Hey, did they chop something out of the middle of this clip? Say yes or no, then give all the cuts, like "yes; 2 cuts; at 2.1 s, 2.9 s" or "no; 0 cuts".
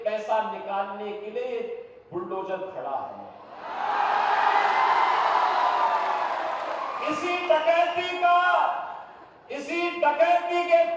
no; 0 cuts